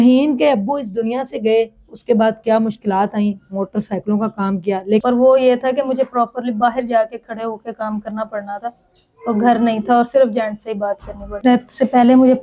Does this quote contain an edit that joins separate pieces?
yes; 2 cuts; at 5.0 s, 11.3 s

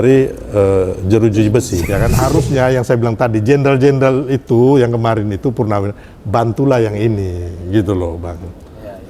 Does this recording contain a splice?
yes; 1 cut; at 1.9 s

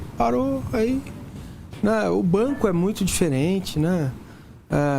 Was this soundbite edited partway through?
yes; 1 cut; at 3.7 s

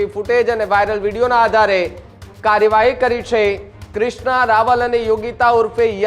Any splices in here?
no; 0 cuts

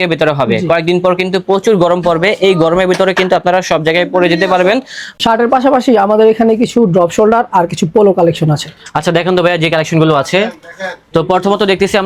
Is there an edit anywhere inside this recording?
no; 0 cuts

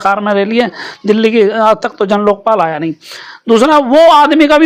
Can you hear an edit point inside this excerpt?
no; 0 cuts

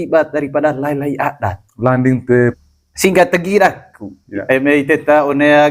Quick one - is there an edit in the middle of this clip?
yes; 1 cut; at 2.6 s

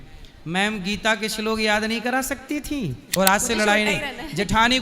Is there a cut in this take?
yes; 1 cut; at 3.1 s

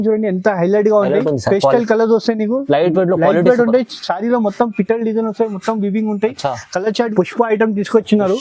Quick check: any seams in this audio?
yes; 1 cut; at 7.1 s

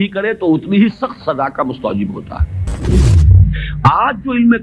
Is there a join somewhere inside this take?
yes; 1 cut; at 3.0 s

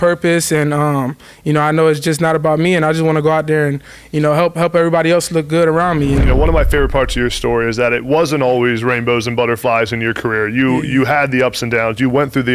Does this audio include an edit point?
yes; 1 cut; at 6.2 s

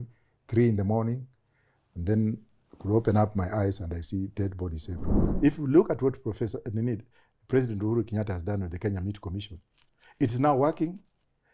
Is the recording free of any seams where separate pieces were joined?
no; 1 cut; at 5.1 s

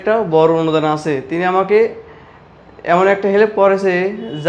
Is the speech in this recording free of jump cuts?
yes; 0 cuts

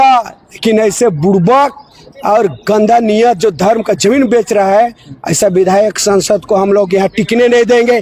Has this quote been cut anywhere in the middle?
no; 0 cuts

